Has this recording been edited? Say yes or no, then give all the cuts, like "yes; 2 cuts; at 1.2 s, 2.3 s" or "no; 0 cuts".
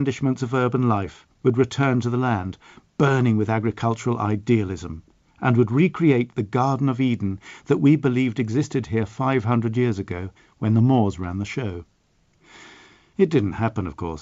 no; 0 cuts